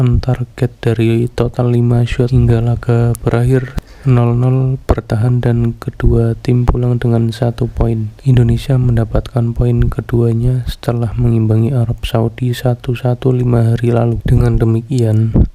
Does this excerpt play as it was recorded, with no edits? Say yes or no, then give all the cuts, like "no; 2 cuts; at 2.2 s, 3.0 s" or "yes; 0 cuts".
no; 4 cuts; at 2.3 s, 3.8 s, 8.1 s, 14.2 s